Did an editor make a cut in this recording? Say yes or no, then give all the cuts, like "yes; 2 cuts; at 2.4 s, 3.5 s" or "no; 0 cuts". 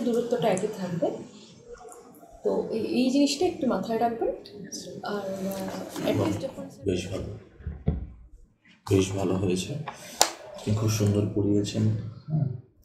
yes; 1 cut; at 6.5 s